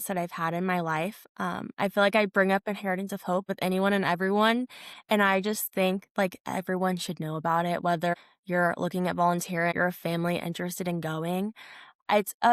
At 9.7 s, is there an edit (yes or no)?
yes